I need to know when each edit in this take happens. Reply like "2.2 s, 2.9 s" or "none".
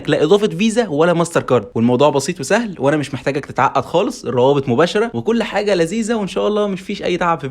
1.7 s, 5.2 s